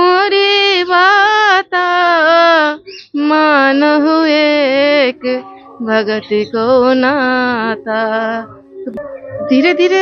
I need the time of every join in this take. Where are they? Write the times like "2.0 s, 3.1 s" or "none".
8.9 s